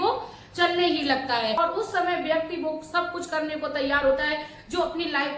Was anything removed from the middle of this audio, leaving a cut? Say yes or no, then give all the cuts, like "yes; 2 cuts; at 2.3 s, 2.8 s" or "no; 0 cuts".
yes; 1 cut; at 1.6 s